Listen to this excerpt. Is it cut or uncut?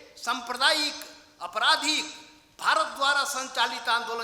uncut